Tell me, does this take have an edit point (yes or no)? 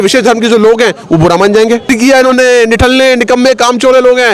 yes